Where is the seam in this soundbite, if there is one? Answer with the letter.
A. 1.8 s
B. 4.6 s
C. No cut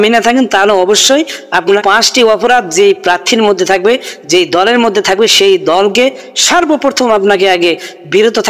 A